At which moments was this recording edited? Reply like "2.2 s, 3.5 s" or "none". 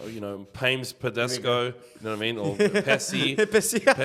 none